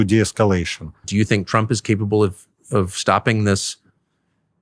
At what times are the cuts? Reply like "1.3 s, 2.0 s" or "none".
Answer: 1.1 s